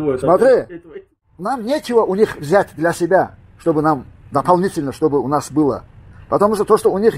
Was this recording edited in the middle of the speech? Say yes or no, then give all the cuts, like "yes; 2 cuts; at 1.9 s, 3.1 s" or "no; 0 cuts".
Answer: yes; 1 cut; at 1.2 s